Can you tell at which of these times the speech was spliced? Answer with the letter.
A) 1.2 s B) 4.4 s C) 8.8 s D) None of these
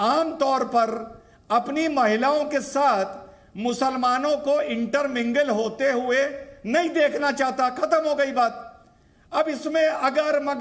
D